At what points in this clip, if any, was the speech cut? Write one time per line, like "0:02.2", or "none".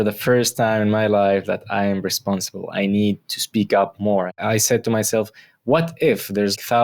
0:04.3